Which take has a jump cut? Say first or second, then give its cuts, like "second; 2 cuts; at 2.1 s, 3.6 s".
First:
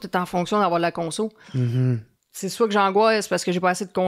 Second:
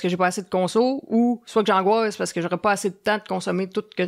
first; 1 cut; at 2.1 s